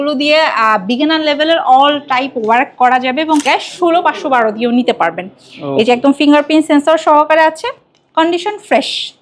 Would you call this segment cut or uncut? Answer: cut